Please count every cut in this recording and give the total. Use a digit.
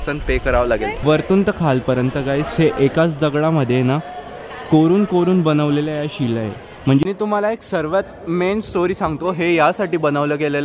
2